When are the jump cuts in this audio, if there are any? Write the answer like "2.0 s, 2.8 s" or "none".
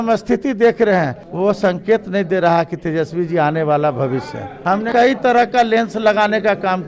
1.2 s, 4.8 s